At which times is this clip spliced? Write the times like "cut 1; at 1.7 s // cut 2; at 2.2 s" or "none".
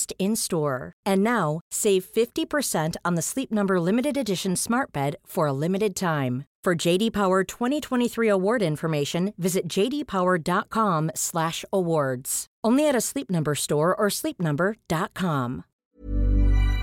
cut 1; at 15.7 s